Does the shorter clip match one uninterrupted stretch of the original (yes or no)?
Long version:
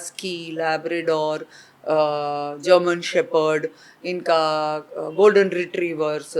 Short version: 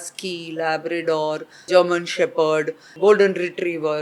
no